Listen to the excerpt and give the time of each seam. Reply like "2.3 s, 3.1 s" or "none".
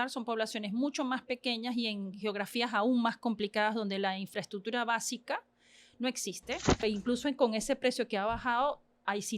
6.8 s